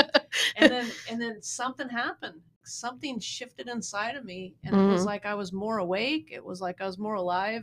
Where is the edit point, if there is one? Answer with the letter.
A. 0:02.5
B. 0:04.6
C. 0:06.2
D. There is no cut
A